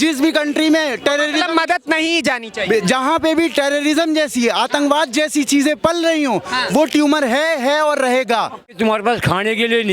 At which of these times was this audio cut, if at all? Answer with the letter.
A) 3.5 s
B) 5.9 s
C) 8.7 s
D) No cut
C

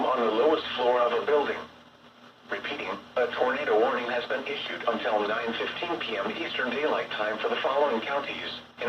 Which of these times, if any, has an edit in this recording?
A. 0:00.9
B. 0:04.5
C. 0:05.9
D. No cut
A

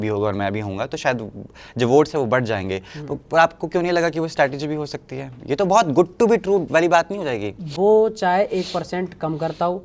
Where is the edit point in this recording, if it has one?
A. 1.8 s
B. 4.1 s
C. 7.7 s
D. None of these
C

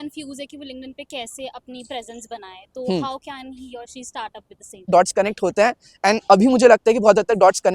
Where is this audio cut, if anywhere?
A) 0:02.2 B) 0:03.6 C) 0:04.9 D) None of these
C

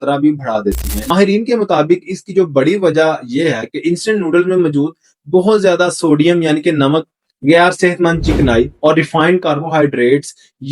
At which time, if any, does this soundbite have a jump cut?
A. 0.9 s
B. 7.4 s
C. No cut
A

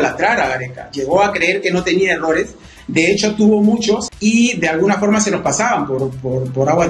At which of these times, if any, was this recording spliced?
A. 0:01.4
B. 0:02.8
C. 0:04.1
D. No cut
C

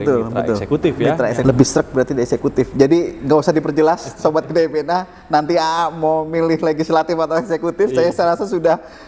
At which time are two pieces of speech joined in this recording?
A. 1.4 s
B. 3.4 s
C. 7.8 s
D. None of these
A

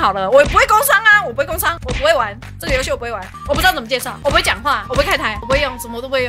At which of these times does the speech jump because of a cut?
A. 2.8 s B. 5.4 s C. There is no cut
B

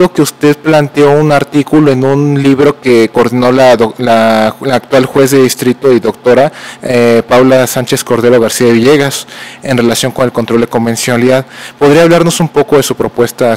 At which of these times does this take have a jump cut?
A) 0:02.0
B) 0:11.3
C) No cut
A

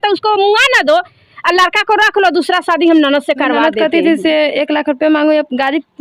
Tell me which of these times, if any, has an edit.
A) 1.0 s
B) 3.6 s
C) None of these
B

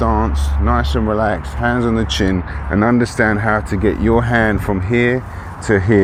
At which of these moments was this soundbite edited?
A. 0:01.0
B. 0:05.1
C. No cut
C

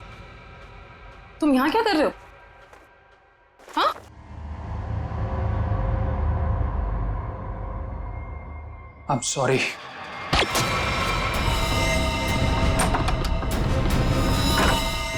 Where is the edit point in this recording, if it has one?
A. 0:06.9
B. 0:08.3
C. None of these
C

